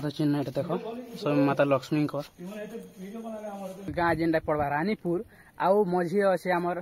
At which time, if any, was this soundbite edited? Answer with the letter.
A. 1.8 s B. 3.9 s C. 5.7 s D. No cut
B